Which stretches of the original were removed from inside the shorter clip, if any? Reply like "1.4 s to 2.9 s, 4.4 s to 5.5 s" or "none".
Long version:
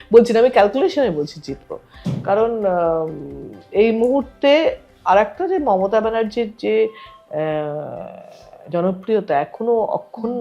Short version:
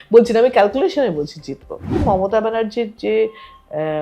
2.0 s to 5.6 s